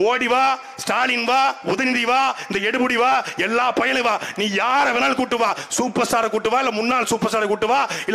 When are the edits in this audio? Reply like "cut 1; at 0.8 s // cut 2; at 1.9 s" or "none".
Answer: none

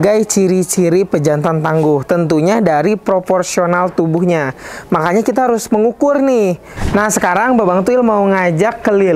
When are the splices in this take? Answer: cut 1; at 6.8 s

